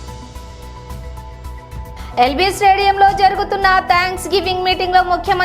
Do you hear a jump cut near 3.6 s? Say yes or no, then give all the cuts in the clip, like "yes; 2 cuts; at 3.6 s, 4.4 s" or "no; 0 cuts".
no; 1 cut; at 1.1 s